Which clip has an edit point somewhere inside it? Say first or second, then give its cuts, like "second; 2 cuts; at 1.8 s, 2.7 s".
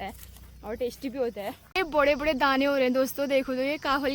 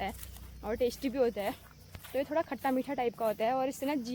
first; 1 cut; at 1.6 s